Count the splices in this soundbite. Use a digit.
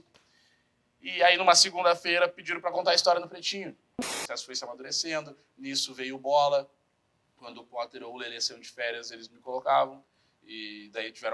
1